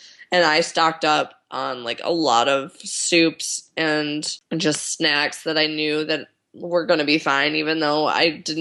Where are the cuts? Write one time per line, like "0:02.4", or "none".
0:04.4